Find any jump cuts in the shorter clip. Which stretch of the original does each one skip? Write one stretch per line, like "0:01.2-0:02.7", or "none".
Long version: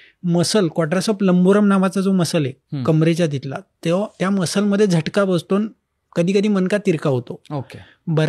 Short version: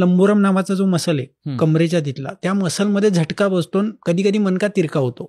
0:03.6-0:04.1
0:05.7-0:06.1